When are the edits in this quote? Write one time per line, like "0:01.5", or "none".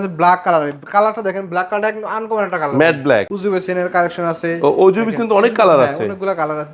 0:03.3